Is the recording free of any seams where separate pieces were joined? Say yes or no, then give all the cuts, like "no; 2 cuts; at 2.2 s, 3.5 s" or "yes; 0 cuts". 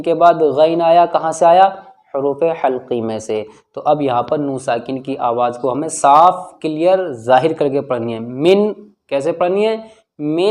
yes; 0 cuts